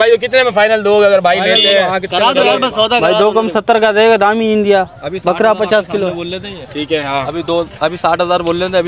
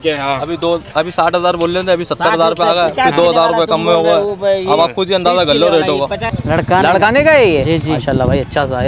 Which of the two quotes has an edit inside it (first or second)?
second